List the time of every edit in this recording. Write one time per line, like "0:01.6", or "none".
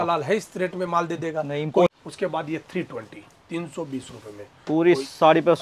0:01.9